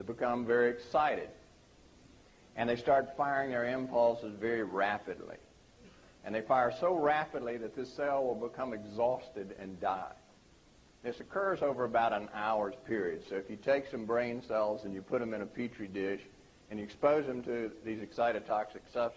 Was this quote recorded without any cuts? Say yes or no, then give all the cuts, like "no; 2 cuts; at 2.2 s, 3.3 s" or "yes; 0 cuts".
no; 1 cut; at 15.2 s